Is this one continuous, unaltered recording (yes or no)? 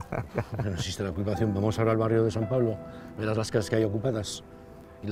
yes